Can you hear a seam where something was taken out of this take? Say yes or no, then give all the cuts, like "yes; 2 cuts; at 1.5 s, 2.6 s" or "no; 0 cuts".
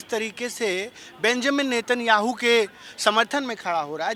no; 0 cuts